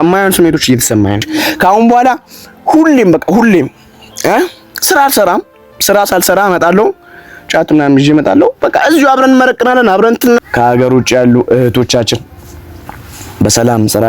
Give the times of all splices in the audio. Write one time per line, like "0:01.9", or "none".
0:01.3
0:10.4